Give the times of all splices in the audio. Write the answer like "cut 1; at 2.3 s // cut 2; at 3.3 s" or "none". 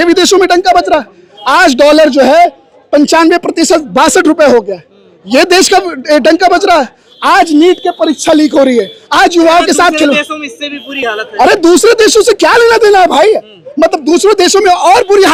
none